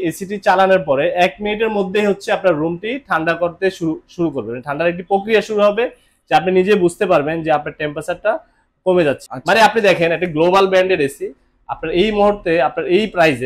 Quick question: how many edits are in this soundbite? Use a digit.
1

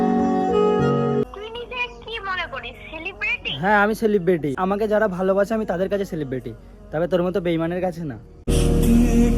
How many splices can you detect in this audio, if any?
2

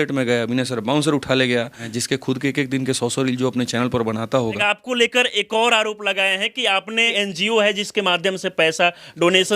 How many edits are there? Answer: 3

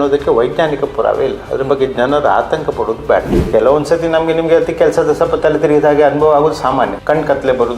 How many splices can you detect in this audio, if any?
2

